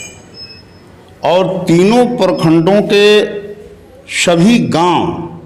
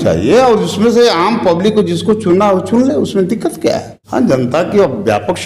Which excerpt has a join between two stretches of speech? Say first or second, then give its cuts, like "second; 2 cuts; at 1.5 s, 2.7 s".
second; 1 cut; at 3.9 s